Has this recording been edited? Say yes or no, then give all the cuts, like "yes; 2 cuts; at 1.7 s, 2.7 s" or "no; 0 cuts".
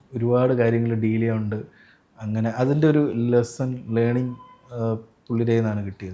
no; 0 cuts